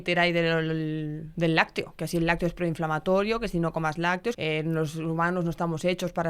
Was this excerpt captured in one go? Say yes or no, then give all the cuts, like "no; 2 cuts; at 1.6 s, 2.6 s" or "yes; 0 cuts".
no; 2 cuts; at 1.2 s, 4.4 s